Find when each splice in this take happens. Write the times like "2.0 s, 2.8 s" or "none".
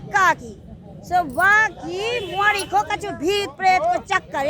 none

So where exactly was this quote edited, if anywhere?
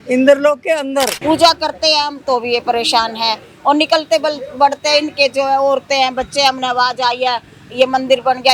1.2 s

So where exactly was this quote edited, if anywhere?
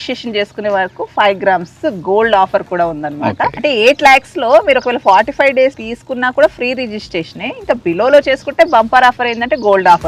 3.5 s, 5.9 s

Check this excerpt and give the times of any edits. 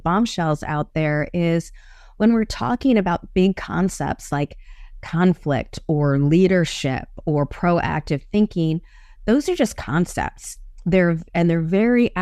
none

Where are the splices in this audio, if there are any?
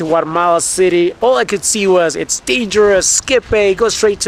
none

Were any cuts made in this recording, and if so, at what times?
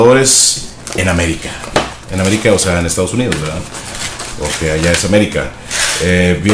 1.7 s

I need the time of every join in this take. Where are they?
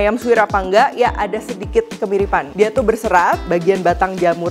3.4 s

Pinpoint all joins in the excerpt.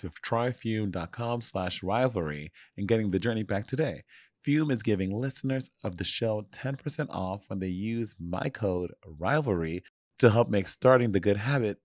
none

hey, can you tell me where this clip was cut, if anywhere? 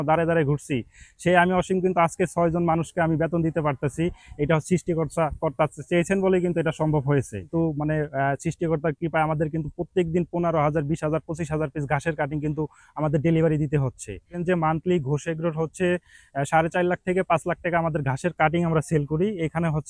7.5 s, 14.3 s

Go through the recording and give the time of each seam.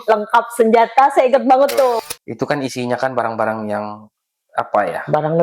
2.0 s

